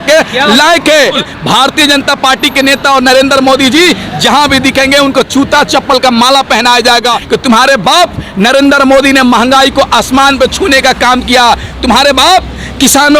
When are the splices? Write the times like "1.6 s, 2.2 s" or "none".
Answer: 1.2 s, 7.2 s